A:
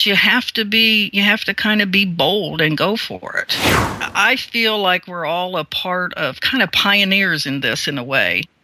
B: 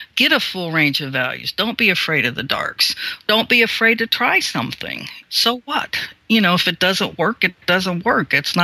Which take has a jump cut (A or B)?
A